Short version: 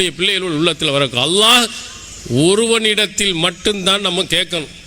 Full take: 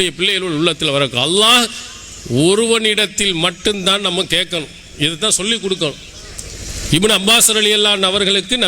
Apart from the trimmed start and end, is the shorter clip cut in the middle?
no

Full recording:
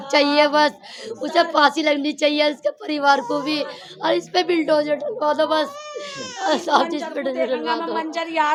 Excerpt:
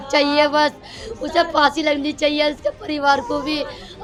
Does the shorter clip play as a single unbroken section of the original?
yes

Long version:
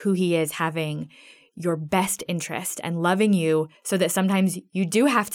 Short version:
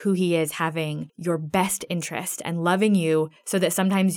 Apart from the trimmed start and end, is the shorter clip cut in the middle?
yes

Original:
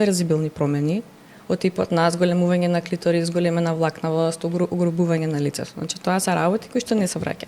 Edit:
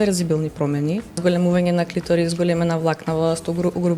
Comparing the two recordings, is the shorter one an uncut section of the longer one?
no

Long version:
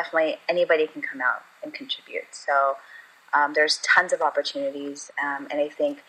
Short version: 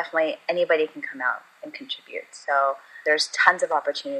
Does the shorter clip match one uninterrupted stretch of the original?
no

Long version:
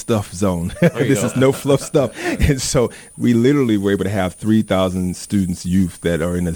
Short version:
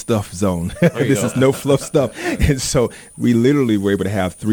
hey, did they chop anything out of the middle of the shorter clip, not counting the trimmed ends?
no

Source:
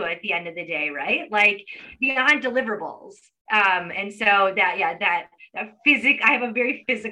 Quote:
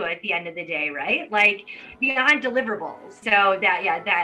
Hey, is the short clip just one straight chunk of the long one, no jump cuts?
no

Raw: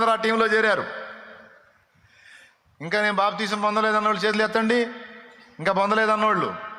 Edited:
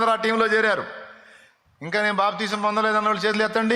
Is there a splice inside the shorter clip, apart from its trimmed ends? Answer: yes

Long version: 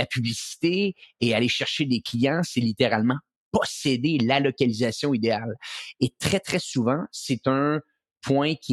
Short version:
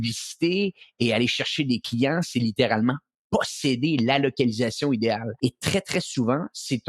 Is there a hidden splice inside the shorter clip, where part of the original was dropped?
yes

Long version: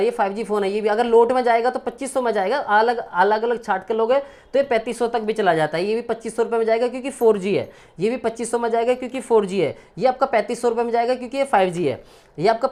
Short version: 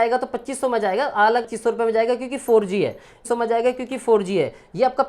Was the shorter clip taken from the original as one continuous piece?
no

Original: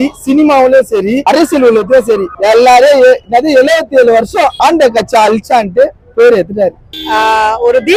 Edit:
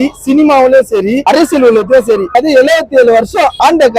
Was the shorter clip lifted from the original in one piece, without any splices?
no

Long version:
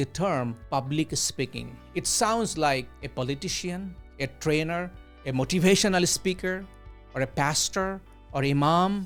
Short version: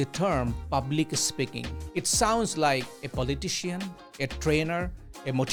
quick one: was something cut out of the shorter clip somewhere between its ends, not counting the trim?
no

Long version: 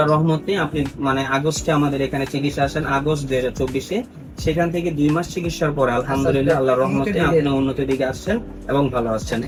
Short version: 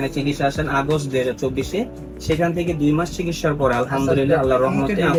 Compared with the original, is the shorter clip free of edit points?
yes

